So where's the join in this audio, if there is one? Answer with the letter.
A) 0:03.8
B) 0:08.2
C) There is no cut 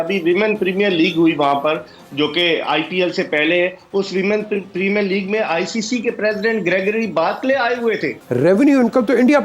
B